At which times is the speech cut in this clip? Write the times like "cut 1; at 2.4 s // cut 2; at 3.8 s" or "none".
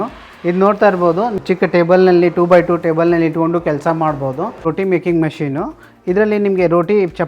cut 1; at 1.3 s // cut 2; at 4.7 s